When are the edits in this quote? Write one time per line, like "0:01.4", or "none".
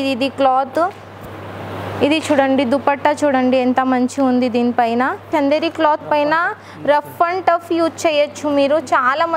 0:05.3